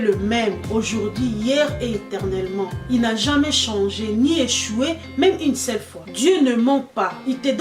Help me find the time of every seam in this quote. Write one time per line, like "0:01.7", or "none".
none